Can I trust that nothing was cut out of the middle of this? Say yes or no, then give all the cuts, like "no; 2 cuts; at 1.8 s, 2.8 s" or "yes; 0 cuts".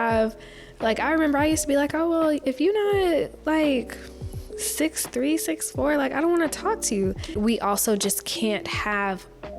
no; 1 cut; at 7.4 s